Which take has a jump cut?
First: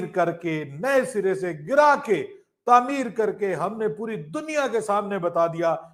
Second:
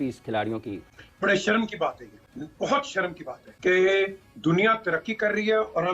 second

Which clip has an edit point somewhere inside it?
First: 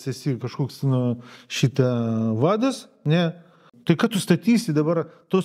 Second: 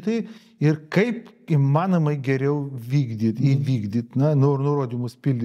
first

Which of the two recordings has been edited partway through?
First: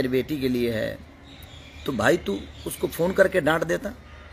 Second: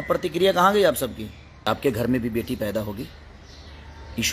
second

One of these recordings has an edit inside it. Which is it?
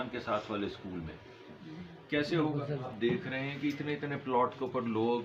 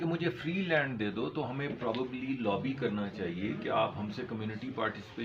first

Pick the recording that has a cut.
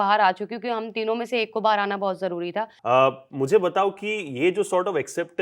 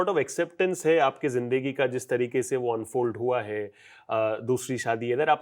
first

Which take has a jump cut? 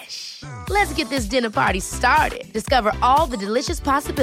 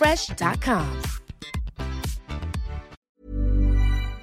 second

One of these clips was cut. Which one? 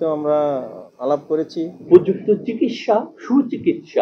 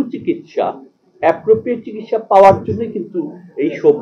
first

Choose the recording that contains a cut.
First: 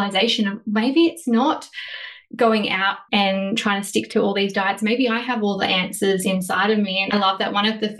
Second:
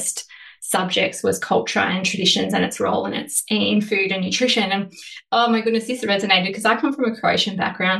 first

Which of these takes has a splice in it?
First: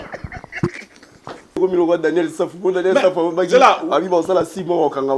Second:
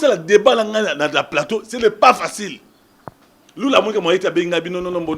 first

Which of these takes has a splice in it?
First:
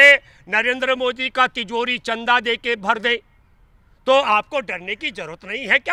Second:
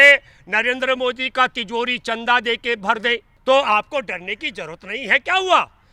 second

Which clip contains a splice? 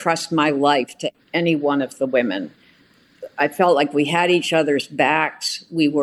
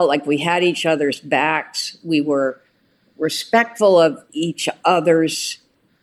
second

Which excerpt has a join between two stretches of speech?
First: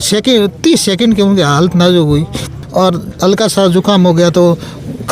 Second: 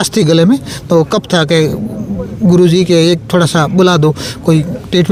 first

